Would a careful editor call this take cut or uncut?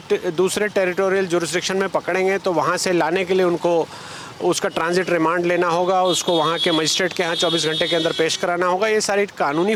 uncut